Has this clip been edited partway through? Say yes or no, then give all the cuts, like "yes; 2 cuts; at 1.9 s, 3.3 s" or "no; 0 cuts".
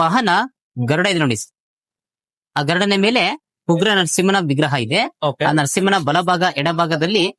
no; 0 cuts